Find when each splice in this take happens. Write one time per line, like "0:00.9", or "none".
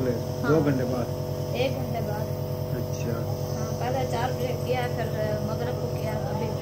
none